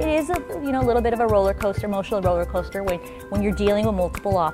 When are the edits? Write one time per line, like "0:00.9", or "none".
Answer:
none